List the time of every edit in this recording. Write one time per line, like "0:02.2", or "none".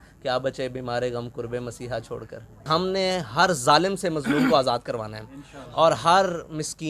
0:02.7